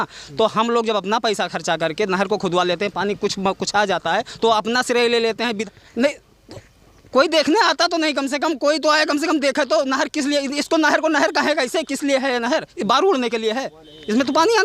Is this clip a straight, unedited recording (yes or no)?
no